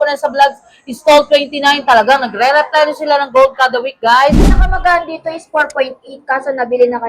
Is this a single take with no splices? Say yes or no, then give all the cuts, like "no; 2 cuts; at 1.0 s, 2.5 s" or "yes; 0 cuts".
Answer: no; 1 cut; at 4.6 s